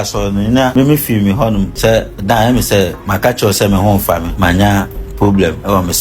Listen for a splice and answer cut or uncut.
cut